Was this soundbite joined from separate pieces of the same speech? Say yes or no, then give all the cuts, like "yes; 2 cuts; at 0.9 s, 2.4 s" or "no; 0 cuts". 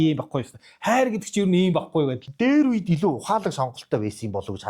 yes; 1 cut; at 2.2 s